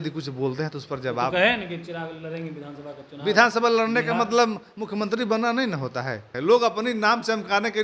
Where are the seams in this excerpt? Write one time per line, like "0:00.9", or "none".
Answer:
0:06.3